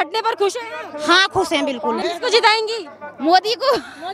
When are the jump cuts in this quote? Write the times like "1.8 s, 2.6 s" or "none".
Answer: 2.0 s